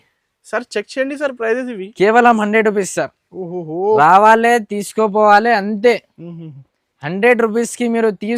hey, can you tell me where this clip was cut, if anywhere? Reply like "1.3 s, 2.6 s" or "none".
none